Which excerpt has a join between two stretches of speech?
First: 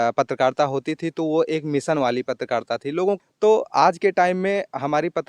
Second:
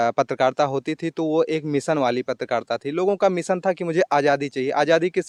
first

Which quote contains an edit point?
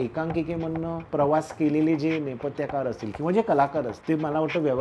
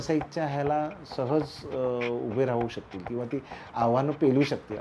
first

